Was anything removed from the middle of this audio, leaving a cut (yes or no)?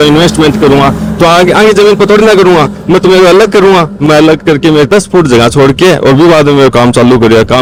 no